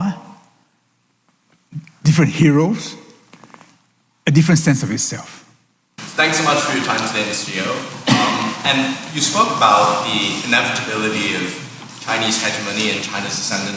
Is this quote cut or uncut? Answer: cut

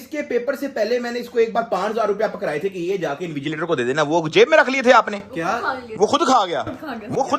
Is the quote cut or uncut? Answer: uncut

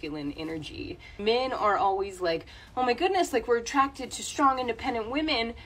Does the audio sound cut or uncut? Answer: cut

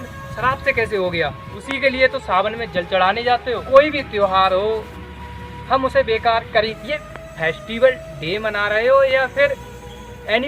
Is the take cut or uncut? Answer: cut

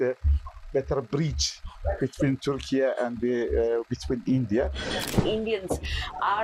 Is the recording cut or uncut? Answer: cut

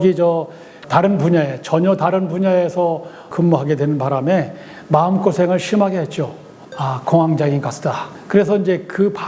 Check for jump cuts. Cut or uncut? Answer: cut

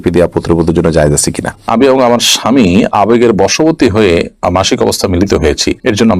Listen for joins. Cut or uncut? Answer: cut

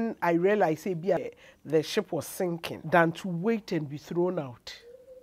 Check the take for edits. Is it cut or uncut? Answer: cut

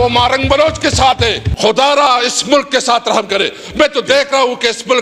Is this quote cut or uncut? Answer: cut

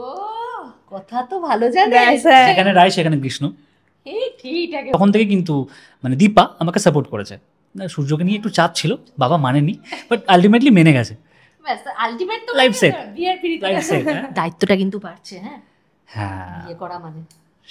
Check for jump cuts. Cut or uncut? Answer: cut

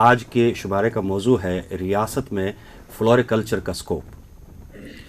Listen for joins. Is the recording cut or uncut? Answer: uncut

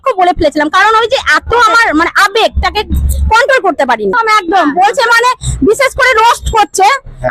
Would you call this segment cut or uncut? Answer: cut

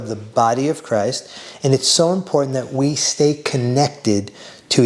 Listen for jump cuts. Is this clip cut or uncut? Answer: cut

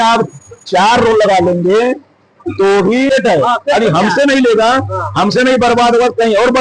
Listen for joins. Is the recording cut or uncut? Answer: cut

